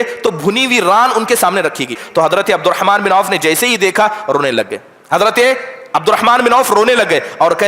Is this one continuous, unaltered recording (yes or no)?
no